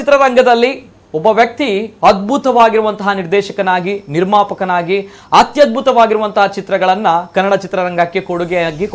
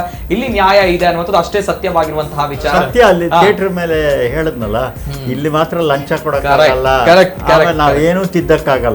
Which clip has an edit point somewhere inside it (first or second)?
second